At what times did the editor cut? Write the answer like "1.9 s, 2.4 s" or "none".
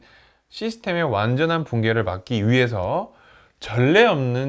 none